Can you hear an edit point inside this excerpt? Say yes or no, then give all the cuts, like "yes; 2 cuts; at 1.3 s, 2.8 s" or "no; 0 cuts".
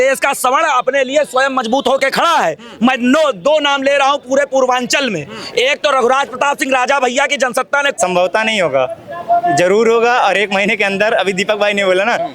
yes; 1 cut; at 7.9 s